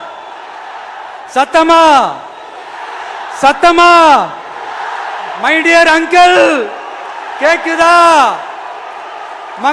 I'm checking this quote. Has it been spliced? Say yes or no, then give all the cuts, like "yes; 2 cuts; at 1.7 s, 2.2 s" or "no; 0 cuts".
no; 0 cuts